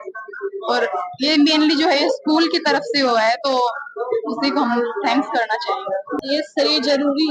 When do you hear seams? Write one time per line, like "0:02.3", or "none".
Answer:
0:06.1